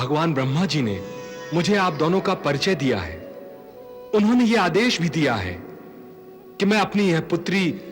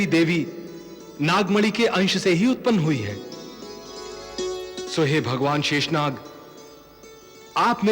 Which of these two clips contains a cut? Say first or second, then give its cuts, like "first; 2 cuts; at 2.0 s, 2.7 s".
second; 1 cut; at 4.3 s